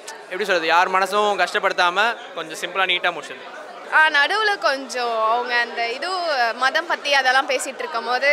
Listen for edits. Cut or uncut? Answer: cut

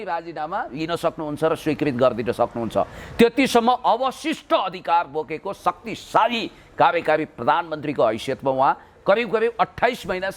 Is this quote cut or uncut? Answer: uncut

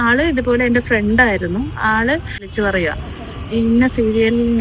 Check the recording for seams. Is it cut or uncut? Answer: cut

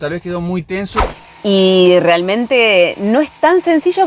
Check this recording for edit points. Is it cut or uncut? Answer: cut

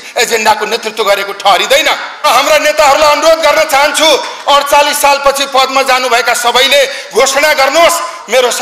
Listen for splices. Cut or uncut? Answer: cut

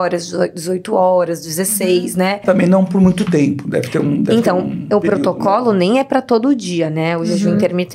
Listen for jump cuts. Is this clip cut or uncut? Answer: cut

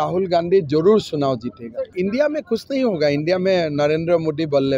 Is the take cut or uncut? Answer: cut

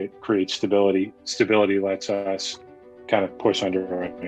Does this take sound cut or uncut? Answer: uncut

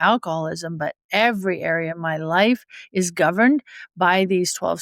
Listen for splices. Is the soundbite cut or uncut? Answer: uncut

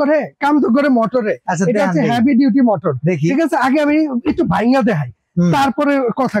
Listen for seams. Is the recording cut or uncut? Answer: uncut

